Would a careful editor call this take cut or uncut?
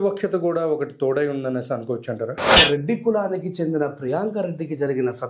cut